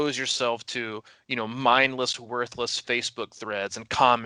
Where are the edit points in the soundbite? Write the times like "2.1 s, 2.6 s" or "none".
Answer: none